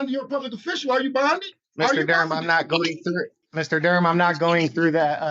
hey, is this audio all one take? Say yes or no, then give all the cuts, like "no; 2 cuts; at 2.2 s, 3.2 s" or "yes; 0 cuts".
no; 2 cuts; at 1.6 s, 3.4 s